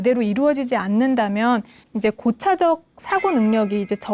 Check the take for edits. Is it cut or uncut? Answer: cut